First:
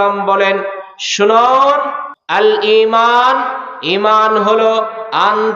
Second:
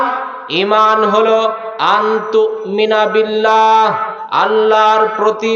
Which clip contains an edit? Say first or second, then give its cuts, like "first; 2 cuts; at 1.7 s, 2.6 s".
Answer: first; 1 cut; at 2.4 s